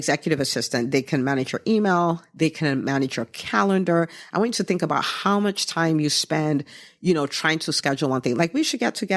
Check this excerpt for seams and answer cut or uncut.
uncut